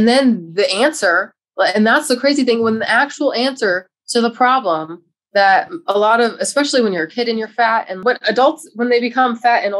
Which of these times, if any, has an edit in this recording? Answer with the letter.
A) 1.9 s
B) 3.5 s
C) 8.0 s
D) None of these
C